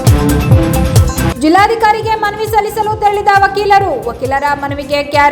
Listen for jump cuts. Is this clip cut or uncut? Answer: cut